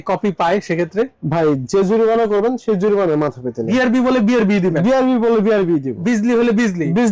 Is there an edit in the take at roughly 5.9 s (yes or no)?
yes